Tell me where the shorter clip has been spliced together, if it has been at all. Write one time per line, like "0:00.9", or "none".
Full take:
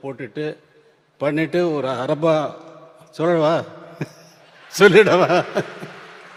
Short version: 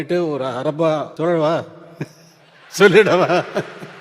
0:01.1